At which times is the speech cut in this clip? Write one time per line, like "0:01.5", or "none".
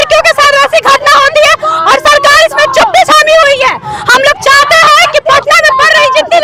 none